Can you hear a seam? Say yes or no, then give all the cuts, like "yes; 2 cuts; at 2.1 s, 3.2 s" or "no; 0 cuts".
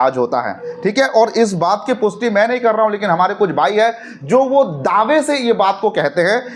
no; 0 cuts